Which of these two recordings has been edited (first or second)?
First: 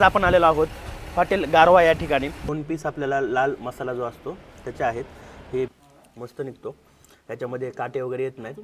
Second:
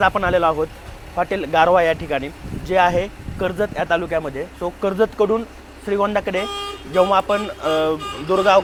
first